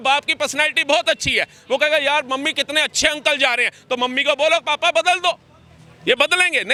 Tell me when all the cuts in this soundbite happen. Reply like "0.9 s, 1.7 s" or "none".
none